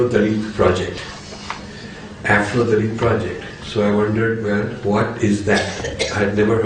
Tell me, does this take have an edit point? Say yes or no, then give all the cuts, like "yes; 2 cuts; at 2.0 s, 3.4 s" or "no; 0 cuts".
no; 0 cuts